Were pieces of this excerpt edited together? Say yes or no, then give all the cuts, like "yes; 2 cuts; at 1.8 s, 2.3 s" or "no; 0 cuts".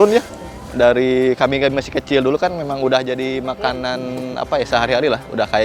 no; 0 cuts